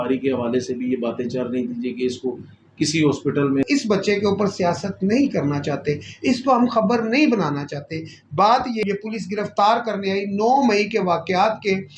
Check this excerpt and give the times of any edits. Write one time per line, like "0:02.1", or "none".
0:03.6
0:08.8

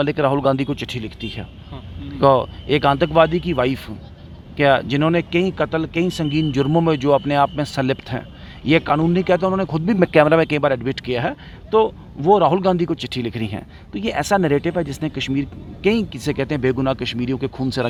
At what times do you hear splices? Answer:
none

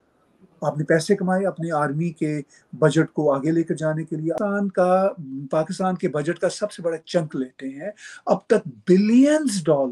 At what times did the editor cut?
0:04.4

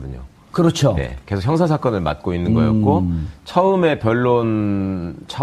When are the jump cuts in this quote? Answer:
none

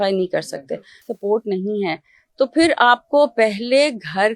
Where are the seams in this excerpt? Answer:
0:00.9

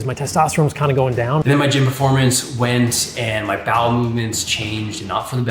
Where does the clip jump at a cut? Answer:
0:01.4

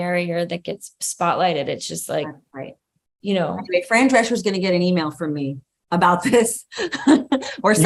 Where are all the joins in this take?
none

